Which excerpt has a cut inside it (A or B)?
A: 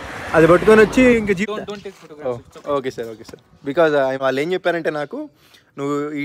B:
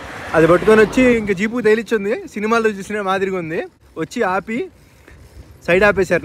A